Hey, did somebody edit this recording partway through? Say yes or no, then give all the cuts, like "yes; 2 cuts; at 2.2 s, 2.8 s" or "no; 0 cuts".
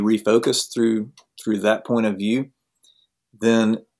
no; 0 cuts